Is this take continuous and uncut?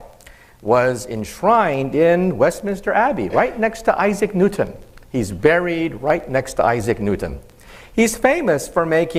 yes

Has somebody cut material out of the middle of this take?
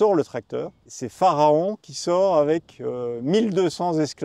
no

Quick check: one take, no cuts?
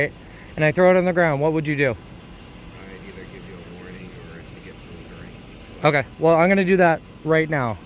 yes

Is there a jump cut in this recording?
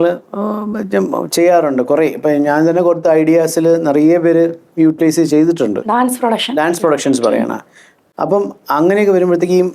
no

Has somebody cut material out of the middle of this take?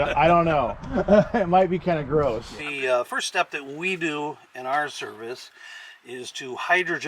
no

